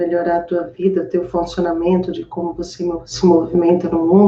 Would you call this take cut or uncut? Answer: uncut